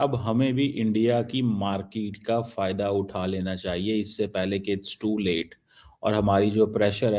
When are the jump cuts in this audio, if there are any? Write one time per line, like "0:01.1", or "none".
none